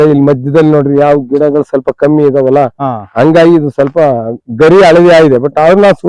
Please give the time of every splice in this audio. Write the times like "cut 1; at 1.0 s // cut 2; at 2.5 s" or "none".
none